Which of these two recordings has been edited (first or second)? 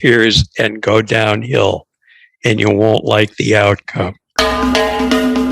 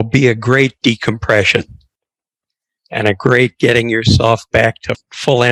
first